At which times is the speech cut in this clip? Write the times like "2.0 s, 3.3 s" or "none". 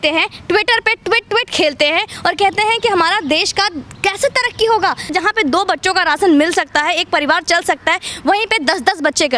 5.1 s